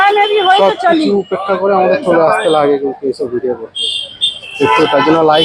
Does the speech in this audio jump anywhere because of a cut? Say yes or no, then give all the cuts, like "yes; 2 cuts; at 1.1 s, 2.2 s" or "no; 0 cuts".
no; 0 cuts